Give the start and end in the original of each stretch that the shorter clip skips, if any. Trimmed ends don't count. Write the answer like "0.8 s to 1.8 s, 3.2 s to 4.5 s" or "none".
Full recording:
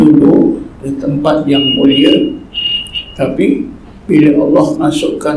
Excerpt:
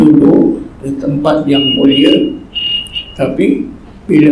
none

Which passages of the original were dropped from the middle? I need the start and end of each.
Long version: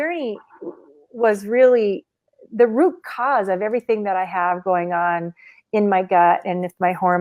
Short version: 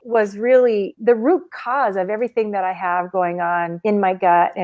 2.0 s to 2.4 s, 5.3 s to 5.6 s

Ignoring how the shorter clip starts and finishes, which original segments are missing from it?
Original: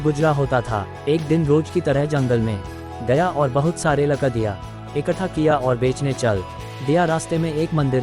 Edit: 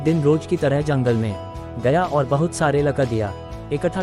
none

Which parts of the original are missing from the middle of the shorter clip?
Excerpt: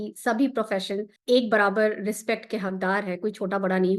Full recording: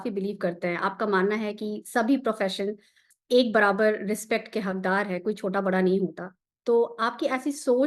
2.8 s to 3.1 s

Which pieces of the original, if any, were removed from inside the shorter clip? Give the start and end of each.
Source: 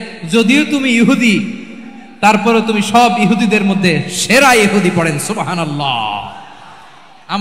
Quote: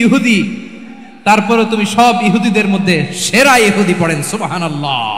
none

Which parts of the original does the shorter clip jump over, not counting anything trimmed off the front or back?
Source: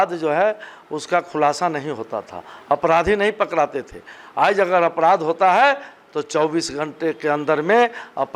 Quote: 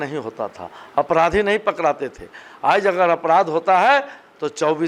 none

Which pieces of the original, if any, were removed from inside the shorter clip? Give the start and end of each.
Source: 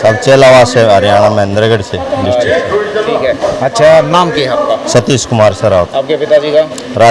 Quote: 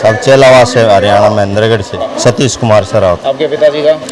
2.0 s to 4.7 s

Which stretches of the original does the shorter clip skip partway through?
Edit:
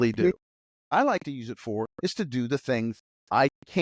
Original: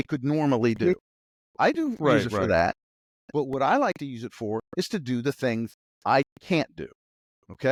1.5 s to 3.7 s

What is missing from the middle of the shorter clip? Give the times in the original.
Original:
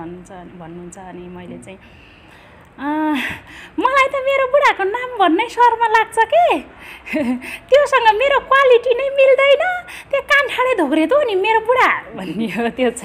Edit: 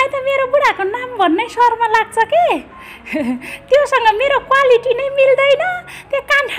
none

